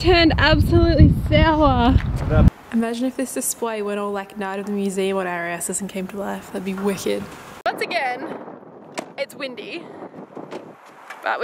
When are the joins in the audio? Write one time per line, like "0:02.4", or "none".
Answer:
0:02.5
0:07.4